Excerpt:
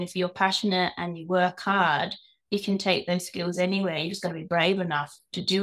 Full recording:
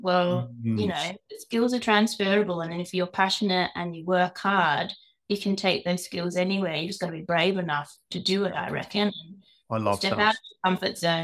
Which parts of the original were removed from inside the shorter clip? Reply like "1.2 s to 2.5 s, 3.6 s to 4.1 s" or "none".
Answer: none